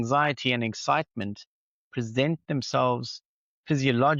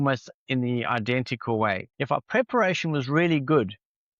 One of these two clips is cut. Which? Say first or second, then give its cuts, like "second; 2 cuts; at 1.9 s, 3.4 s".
second; 1 cut; at 1.9 s